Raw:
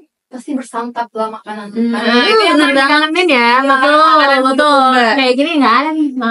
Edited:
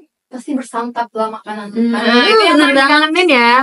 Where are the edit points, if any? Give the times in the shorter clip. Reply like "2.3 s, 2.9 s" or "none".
none

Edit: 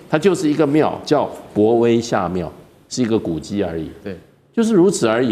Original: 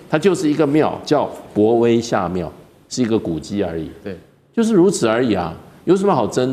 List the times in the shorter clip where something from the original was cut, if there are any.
none

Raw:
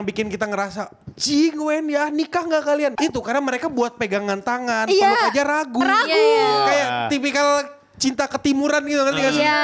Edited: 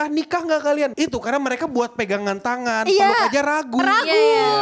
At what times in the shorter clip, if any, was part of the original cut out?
none

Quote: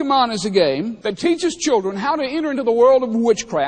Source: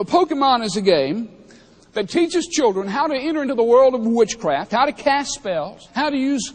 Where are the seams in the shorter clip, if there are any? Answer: 0.9 s

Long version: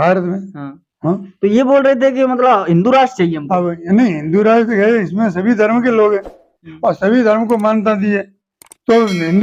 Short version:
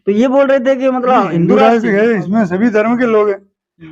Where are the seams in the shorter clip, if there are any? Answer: 1.5 s

